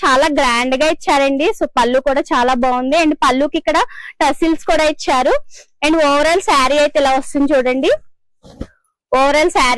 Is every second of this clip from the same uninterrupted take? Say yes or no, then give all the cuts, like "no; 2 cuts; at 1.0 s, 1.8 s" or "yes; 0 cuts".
yes; 0 cuts